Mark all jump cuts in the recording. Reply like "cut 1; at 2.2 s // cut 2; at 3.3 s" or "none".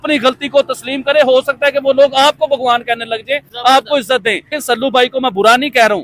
cut 1; at 4.6 s